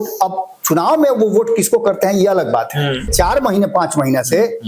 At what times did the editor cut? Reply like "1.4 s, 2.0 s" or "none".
3.1 s